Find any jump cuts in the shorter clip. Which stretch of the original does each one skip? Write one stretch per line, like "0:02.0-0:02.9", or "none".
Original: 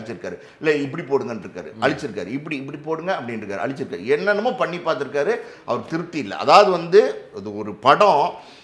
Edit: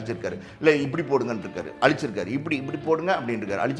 none